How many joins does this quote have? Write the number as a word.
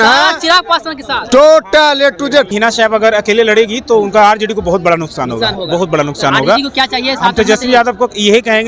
one